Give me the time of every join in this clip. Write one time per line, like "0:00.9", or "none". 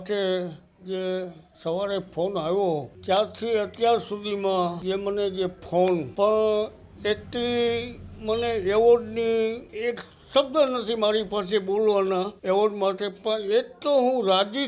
0:01.4
0:02.9
0:04.8
0:06.1
0:09.7
0:12.3